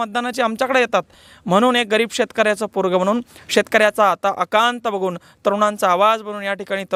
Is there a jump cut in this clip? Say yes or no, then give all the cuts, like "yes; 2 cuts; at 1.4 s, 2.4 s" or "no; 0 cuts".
no; 0 cuts